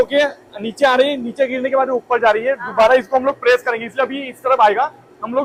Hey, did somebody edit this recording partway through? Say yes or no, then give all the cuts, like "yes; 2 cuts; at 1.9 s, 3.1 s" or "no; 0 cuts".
no; 0 cuts